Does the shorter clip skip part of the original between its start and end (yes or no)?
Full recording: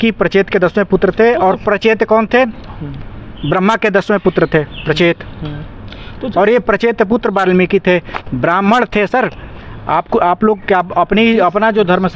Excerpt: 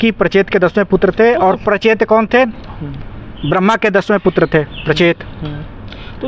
no